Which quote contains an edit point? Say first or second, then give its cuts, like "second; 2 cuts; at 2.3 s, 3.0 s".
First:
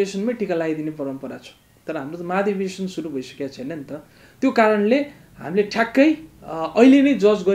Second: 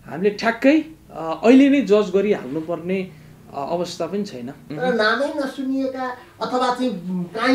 second; 1 cut; at 4.6 s